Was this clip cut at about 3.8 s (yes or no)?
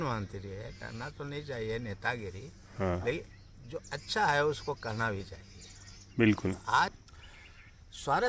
no